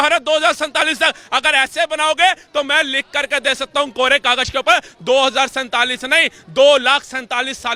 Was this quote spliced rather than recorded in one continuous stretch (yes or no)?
no